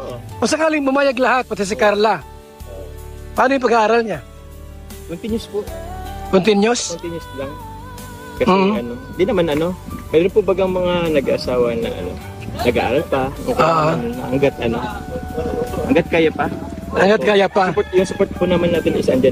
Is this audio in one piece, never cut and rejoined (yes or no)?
yes